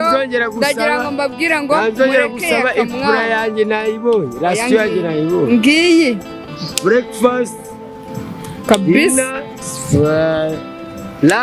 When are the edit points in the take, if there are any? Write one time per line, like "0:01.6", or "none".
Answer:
none